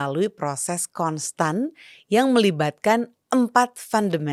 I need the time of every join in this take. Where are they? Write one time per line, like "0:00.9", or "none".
none

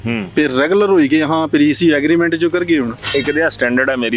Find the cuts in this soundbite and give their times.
0:03.1

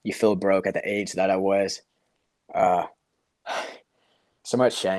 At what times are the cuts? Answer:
none

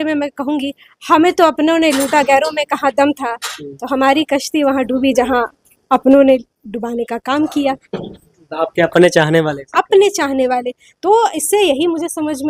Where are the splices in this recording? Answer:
none

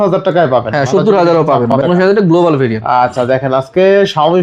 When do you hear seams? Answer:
0:01.8

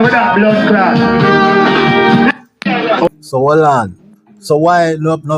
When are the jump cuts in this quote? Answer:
0:03.1

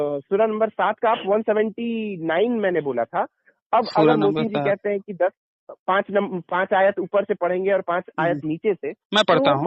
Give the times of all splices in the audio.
none

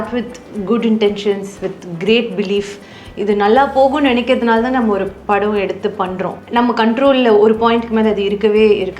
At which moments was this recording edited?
0:06.4

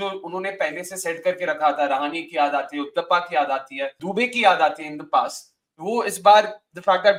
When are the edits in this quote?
none

